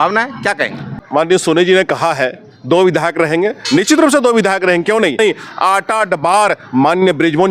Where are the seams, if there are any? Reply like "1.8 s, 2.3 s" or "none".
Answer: 1.0 s, 5.2 s